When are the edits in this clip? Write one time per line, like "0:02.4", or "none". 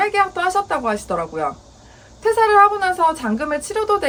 none